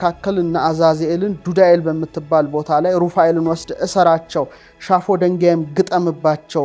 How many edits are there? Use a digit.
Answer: 0